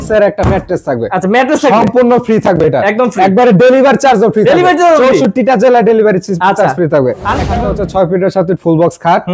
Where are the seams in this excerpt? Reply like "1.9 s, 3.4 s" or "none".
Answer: 7.5 s

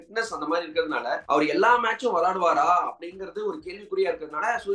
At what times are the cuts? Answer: 1.2 s

